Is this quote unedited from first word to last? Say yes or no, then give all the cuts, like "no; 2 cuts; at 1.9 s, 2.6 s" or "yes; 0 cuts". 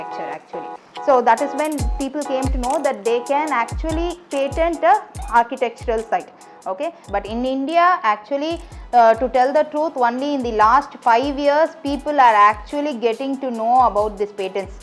no; 1 cut; at 7.0 s